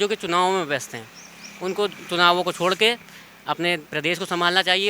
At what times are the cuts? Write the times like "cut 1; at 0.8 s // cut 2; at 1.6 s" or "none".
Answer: none